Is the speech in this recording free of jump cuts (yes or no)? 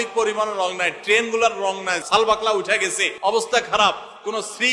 no